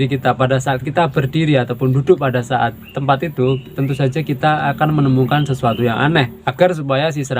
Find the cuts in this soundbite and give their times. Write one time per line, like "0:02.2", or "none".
0:06.4